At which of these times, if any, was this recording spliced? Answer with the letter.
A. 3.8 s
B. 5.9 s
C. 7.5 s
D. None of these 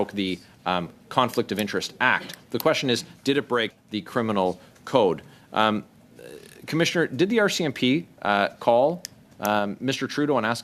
A